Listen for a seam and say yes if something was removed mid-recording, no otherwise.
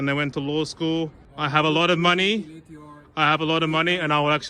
yes